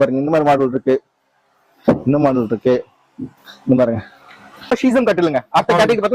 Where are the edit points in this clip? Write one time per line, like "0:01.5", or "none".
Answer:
0:04.7